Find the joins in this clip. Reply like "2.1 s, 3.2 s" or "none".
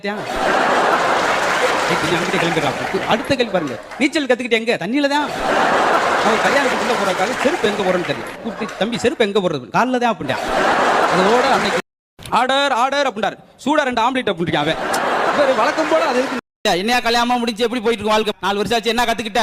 none